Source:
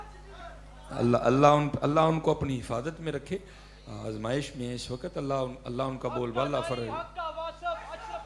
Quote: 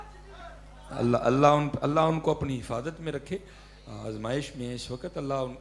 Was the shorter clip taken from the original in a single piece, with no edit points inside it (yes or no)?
yes